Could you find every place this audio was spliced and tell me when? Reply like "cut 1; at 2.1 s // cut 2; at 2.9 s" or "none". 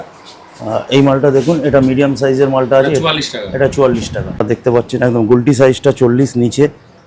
cut 1; at 4.4 s

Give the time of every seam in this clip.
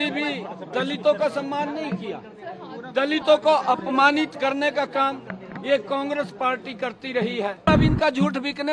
cut 1; at 7.8 s

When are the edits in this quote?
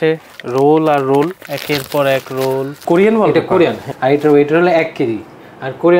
cut 1; at 1.5 s // cut 2; at 2.8 s // cut 3; at 3.9 s

